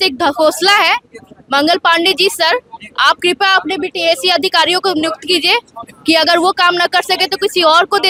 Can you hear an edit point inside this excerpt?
no; 0 cuts

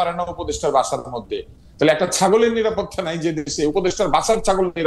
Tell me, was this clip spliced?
yes; 1 cut; at 1.6 s

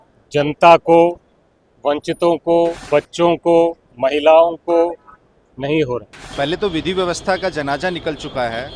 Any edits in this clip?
yes; 2 cuts; at 2.8 s, 6.2 s

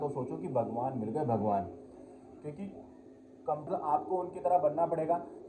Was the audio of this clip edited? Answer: yes; 1 cut; at 3.7 s

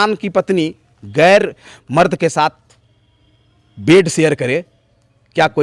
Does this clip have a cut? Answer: no; 0 cuts

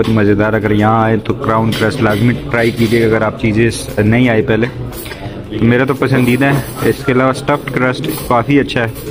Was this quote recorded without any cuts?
yes; 0 cuts

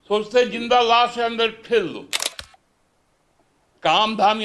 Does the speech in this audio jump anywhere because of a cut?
yes; 1 cut; at 2.3 s

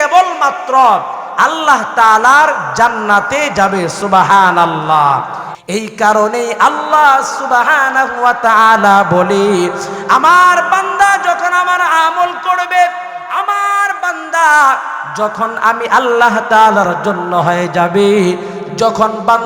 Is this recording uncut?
no; 1 cut; at 5.5 s

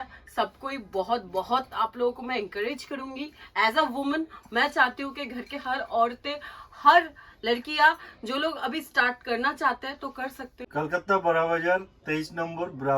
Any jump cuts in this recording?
yes; 1 cut; at 10.5 s

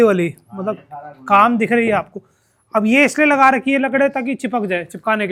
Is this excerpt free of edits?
yes; 0 cuts

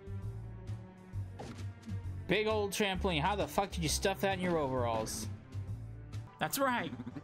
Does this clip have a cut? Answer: yes; 1 cut; at 6.2 s

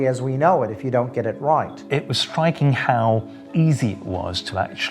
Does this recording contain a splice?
yes; 2 cuts; at 1.7 s, 3.4 s

